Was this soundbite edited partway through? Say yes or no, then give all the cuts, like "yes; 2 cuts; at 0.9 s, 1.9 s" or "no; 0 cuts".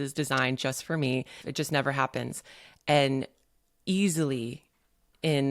yes; 1 cut; at 1.4 s